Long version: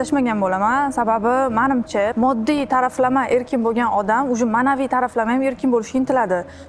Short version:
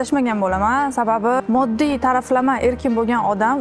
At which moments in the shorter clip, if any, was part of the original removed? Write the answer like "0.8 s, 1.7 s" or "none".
1.4 s